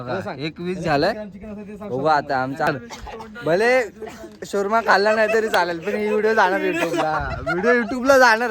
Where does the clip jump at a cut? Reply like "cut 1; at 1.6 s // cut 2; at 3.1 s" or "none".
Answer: cut 1; at 2.7 s